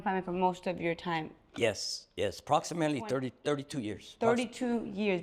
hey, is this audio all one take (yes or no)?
yes